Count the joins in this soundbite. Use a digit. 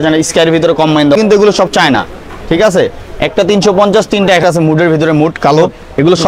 2